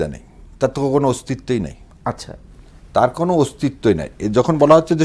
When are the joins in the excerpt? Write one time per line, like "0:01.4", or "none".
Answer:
none

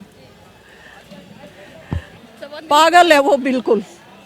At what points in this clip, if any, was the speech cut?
0:02.1

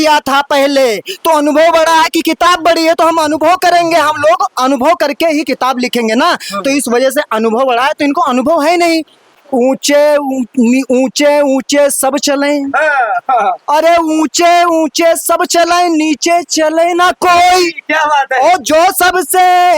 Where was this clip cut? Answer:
0:09.2

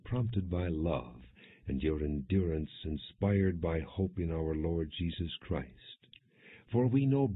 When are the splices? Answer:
0:04.7

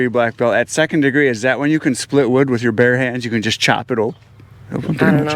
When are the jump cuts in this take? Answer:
none

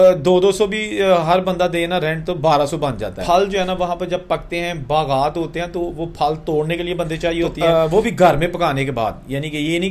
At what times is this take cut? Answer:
0:03.2
0:07.5

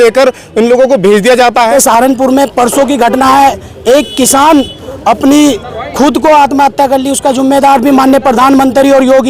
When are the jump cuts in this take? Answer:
0:01.7

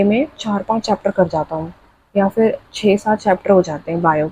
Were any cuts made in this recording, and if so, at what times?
none

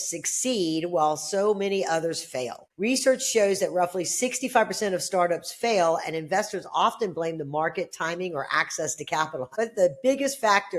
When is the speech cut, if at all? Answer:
0:02.6
0:09.5

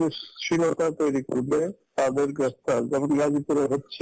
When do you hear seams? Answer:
0:01.8

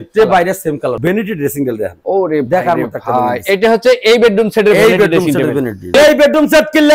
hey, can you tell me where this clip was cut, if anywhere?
0:01.0
0:05.9

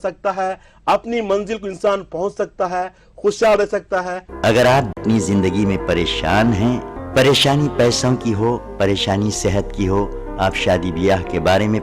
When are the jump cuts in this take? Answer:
0:04.1
0:05.0

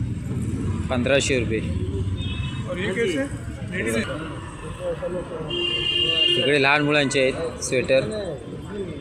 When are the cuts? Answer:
0:04.1

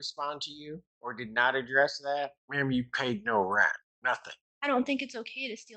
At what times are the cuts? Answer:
0:00.9
0:02.4
0:04.2

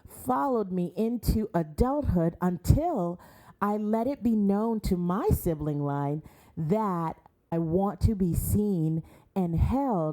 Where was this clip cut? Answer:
0:07.5

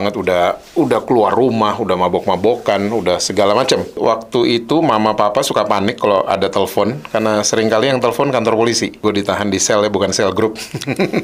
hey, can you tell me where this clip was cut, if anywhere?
0:04.0
0:09.0

